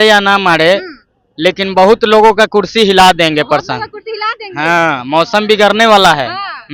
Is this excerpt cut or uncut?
uncut